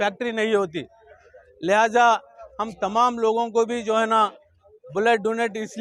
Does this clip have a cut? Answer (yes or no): no